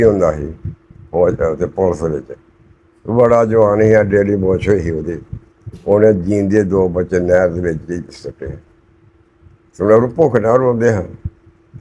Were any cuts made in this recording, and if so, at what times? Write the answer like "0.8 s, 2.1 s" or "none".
none

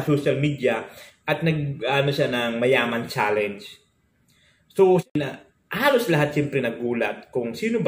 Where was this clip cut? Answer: 5.0 s

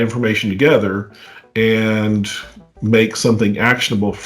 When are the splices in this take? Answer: none

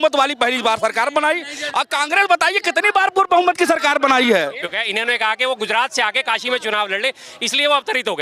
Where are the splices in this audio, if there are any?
4.8 s

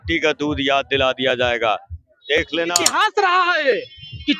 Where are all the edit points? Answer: 2.8 s

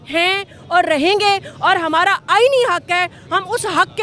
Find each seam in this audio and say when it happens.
none

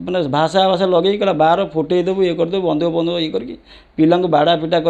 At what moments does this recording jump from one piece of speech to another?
none

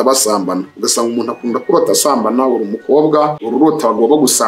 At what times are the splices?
3.4 s

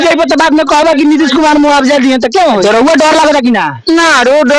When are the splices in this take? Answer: 2.6 s

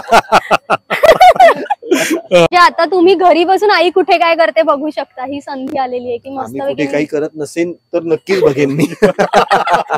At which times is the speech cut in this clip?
2.5 s

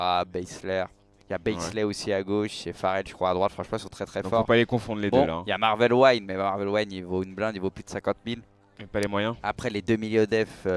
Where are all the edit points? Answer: 3.1 s

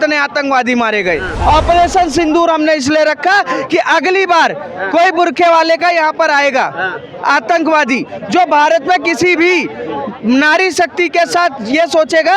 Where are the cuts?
1.3 s

